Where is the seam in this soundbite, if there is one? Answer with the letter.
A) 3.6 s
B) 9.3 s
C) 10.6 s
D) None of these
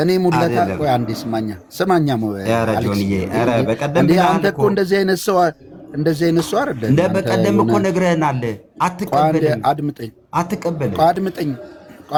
D